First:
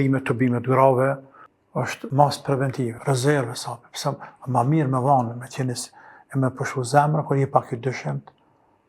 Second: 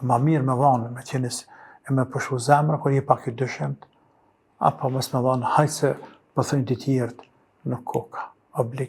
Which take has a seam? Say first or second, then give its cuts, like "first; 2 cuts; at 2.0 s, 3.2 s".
first; 2 cuts; at 1.5 s, 3.0 s